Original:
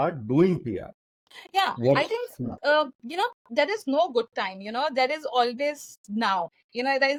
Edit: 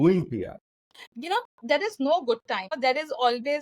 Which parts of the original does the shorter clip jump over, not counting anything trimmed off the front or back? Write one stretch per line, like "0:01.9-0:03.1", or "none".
0:01.4-0:03.0
0:04.6-0:04.9

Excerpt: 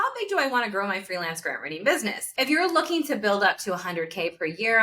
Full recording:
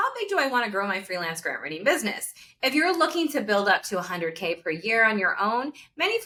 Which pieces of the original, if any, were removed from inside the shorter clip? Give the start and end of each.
0:02.2-0:02.5

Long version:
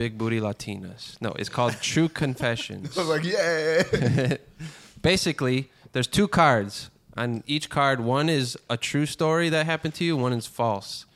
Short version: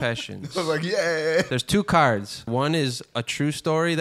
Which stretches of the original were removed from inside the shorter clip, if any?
0:03.9-0:05.9
0:06.9-0:08.0

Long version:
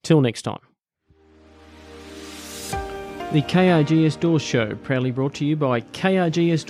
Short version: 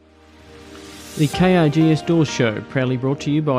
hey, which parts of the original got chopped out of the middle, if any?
0:02.6-0:03.3

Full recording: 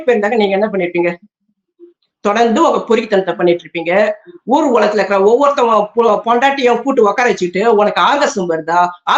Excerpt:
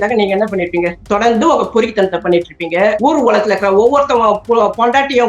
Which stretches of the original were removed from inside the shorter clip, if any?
0:01.2-0:02.1
0:04.1-0:04.5

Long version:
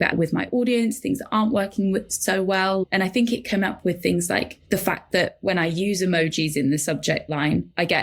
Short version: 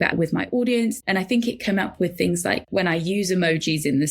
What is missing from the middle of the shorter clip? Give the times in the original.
0:01.0-0:02.9
0:04.5-0:05.4

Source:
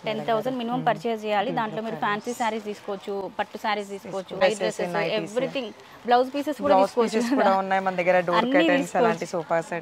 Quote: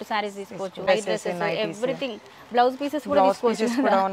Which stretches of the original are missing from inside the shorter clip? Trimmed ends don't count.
none

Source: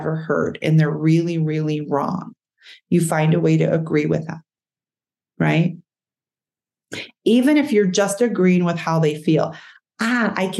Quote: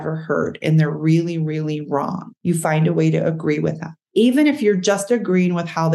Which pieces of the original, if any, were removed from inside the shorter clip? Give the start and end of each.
0:02.3-0:02.7
0:04.4-0:07.0

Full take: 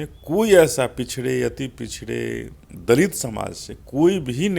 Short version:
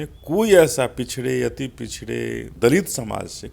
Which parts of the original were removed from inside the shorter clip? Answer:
0:02.5-0:02.7

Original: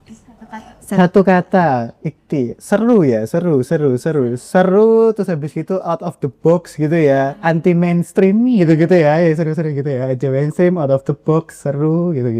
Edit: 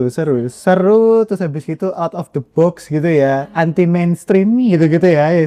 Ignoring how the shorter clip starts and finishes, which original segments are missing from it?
none

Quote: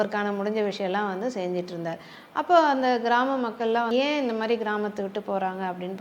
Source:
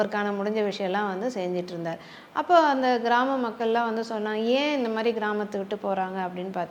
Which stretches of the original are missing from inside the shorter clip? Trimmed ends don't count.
0:03.9-0:04.4

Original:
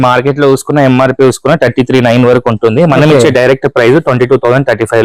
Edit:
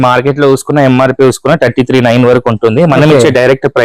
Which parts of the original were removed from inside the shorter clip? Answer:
none

